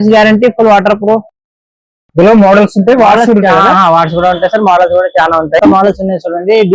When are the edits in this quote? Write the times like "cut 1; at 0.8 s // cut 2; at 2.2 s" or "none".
cut 1; at 5.6 s